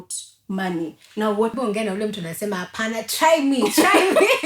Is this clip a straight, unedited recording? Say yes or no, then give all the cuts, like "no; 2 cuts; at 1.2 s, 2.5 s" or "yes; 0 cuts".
no; 1 cut; at 1.5 s